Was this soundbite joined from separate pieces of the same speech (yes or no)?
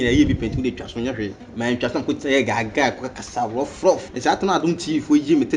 yes